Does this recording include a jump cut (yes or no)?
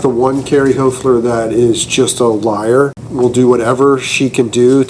yes